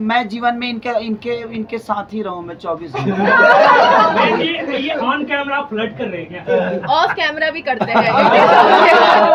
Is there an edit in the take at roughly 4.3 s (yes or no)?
no